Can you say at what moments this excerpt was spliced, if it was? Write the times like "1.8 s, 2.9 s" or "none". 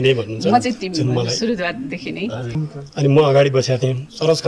2.6 s